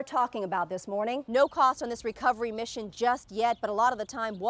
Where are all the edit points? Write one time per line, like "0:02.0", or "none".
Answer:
0:01.2

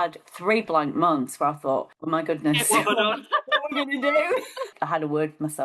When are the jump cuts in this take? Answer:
0:01.9
0:04.7

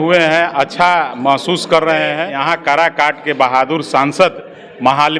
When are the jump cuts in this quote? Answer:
0:02.3

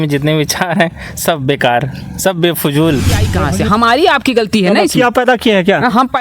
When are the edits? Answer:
0:03.5

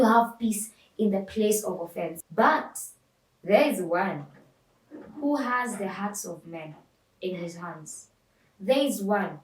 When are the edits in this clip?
0:02.2

